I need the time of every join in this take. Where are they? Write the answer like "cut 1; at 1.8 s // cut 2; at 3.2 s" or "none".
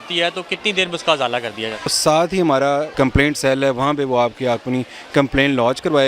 cut 1; at 2.0 s // cut 2; at 2.9 s